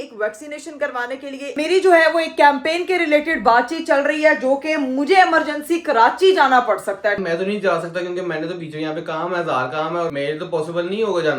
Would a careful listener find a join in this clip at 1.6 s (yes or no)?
yes